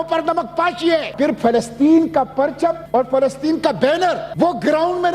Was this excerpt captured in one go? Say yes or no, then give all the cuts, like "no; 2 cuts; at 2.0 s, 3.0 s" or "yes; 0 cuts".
no; 3 cuts; at 1.1 s, 2.8 s, 4.3 s